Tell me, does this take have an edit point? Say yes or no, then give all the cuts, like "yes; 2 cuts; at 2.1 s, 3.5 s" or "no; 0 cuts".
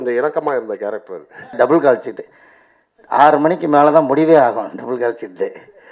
yes; 1 cut; at 1.5 s